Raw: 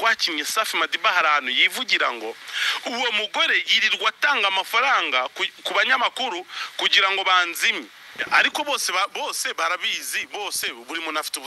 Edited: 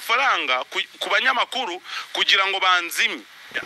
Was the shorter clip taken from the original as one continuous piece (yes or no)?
yes